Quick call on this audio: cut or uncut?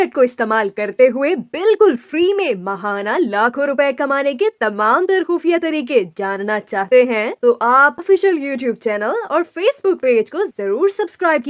uncut